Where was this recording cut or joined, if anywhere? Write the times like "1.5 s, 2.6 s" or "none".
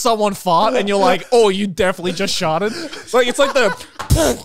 none